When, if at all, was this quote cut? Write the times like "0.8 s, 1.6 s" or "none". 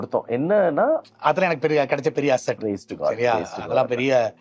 1.0 s